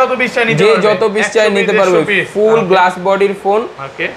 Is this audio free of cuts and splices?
yes; 0 cuts

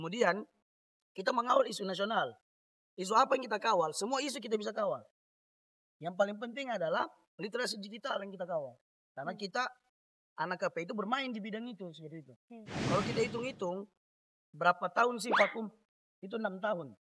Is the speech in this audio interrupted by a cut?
yes; 1 cut; at 12.9 s

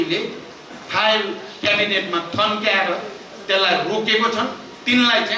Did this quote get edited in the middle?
no; 0 cuts

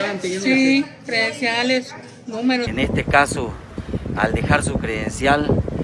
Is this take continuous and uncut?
no; 1 cut; at 2.7 s

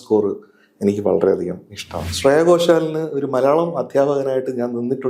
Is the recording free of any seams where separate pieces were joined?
no; 1 cut; at 2.1 s

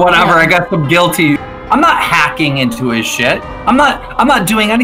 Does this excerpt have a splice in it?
yes; 2 cuts; at 1.5 s, 3.5 s

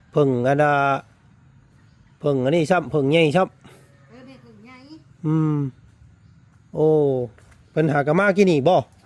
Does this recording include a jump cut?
no; 0 cuts

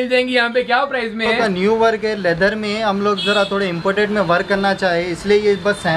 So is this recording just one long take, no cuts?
no; 1 cut; at 1.2 s

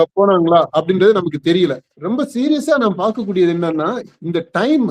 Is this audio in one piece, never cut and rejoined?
no; 1 cut; at 1.9 s

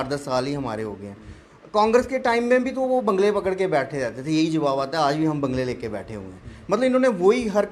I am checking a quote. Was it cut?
no; 0 cuts

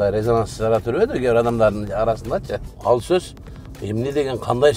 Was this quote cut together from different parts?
yes; 1 cut; at 2.7 s

